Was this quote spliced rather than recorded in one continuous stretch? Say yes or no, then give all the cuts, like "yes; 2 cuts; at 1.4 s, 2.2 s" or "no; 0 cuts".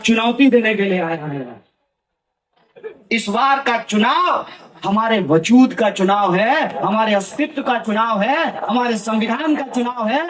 yes; 1 cut; at 3.0 s